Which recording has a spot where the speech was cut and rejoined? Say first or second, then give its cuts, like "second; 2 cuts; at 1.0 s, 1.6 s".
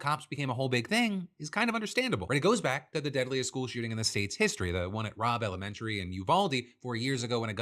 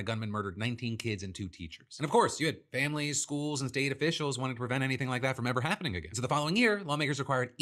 first; 1 cut; at 6.1 s